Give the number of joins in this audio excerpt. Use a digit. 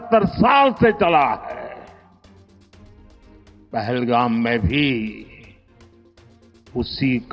0